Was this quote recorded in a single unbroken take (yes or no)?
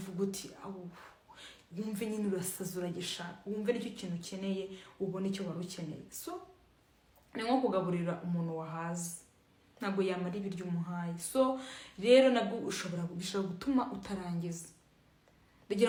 yes